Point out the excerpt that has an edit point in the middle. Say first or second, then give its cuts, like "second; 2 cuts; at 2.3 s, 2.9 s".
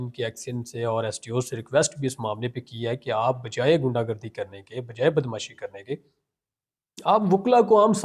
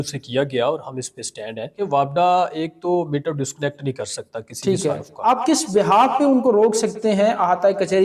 second; 2 cuts; at 1.8 s, 5.2 s